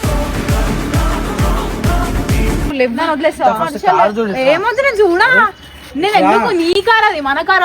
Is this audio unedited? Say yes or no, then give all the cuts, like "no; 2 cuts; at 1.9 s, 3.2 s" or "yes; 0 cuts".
no; 1 cut; at 2.7 s